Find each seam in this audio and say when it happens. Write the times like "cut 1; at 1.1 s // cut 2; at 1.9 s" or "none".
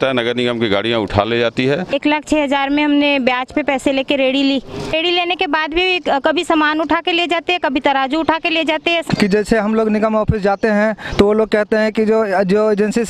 cut 1; at 1.9 s // cut 2; at 4.7 s // cut 3; at 9.0 s